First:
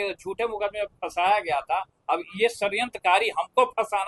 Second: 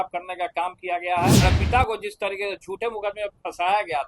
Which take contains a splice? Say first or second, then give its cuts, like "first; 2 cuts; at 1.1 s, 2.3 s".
second; 1 cut; at 1.4 s